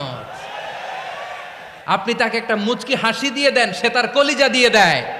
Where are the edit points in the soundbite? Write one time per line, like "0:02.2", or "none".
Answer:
0:01.7